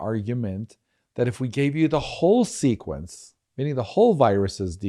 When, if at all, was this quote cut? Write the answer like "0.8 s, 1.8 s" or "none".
none